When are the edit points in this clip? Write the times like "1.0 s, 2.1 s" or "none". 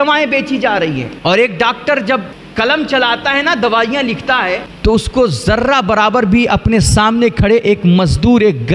1.1 s, 2.4 s, 4.7 s